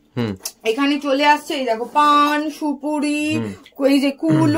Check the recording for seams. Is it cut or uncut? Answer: uncut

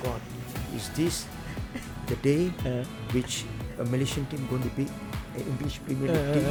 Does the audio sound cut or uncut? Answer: uncut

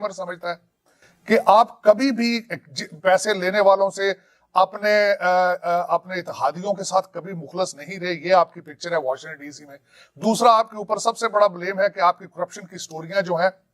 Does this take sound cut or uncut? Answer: uncut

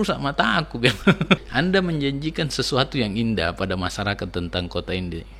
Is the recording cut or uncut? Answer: cut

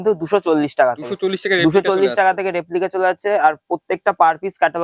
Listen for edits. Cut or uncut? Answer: uncut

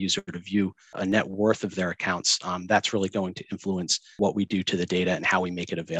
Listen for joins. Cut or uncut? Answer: cut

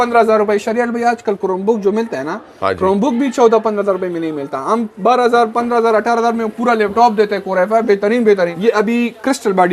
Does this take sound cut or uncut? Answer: cut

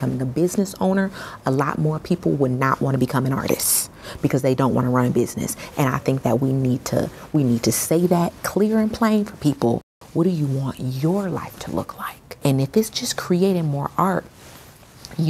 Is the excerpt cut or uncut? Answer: cut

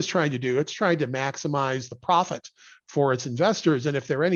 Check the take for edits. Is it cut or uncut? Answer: uncut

